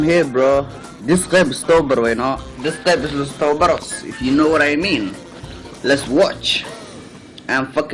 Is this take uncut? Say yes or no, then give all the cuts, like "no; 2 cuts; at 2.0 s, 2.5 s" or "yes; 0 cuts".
yes; 0 cuts